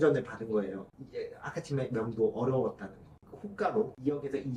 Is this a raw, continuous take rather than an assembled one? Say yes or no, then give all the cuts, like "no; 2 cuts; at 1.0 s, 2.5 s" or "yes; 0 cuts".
yes; 0 cuts